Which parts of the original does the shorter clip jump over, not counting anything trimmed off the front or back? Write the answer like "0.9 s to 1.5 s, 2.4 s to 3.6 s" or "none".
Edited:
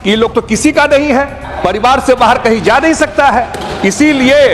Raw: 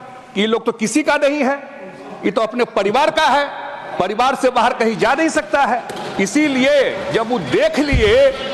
1.7 s to 3.8 s